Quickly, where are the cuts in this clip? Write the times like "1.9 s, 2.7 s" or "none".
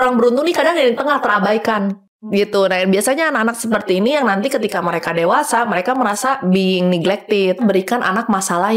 7.6 s